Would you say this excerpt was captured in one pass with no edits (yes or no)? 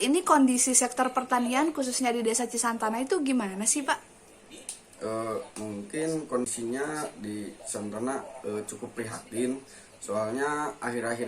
no